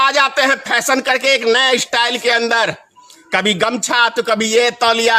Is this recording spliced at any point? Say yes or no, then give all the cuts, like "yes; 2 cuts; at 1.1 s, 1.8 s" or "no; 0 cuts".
no; 0 cuts